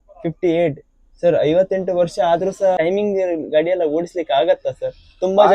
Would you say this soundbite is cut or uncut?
cut